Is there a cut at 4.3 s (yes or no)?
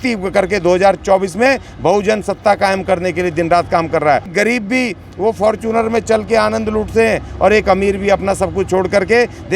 yes